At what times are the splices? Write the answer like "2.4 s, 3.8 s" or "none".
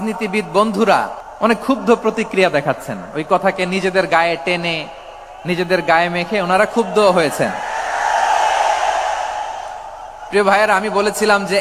1.2 s